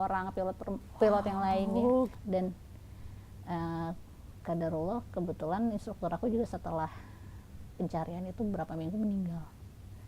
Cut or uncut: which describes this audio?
cut